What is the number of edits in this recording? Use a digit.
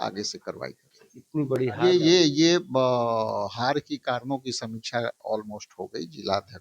1